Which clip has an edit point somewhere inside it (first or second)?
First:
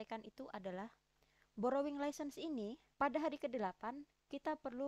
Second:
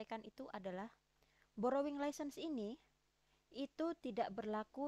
first